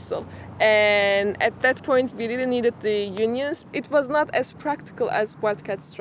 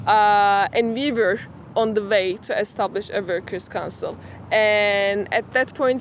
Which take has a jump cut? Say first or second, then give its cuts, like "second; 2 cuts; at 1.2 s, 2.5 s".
first; 1 cut; at 3.6 s